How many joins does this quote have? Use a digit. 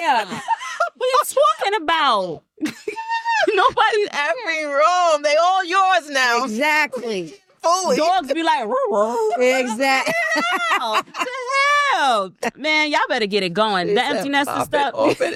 0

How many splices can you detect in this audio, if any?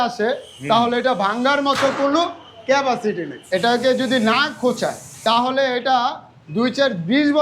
2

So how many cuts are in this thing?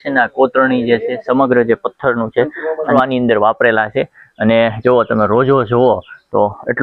1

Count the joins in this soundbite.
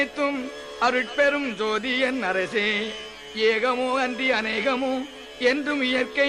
1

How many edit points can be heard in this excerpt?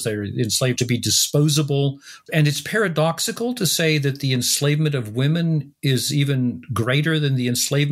2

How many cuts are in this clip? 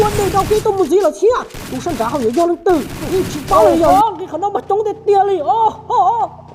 1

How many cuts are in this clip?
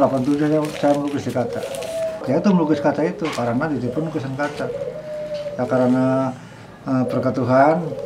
1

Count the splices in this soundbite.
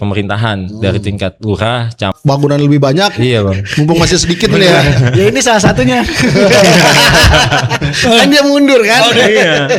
1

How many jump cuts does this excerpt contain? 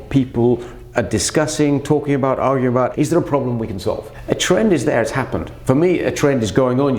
3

